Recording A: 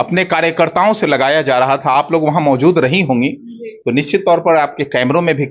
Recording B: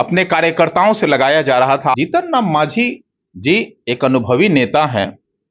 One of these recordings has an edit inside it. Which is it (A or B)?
B